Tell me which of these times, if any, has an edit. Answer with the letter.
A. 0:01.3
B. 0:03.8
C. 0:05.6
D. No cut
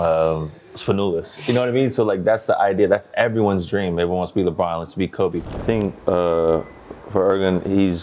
C